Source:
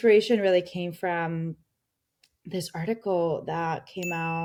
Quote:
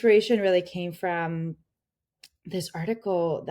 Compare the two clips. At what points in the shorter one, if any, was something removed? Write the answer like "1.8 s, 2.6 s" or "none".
none